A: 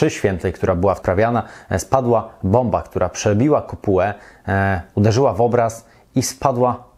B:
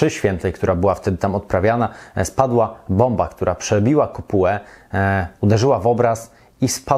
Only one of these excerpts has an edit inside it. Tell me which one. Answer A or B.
A